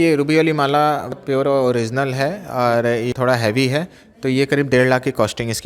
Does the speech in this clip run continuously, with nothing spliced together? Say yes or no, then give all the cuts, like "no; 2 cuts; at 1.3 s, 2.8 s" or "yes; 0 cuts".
no; 2 cuts; at 1.1 s, 3.1 s